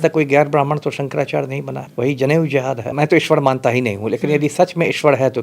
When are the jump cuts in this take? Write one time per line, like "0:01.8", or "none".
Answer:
0:01.8
0:02.9

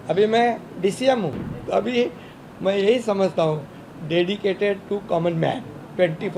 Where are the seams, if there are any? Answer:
0:01.5

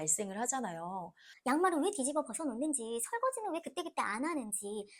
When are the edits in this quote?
0:01.2

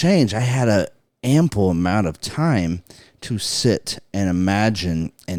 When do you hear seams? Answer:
none

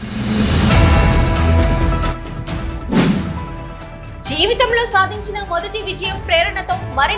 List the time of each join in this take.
none

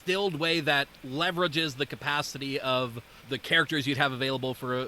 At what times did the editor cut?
0:03.1

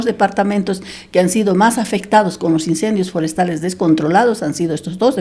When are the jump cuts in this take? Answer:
none

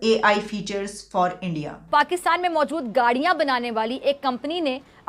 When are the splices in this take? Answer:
0:01.8

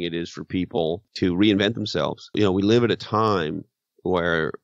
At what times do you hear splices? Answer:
0:01.1
0:02.3

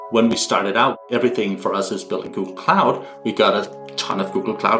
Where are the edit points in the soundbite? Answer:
0:01.0

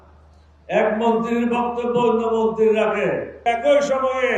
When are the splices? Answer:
0:03.3

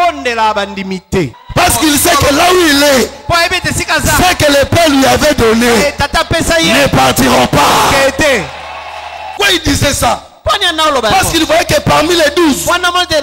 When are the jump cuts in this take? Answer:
0:01.4
0:09.3

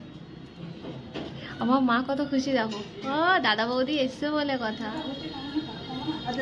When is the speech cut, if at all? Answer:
none

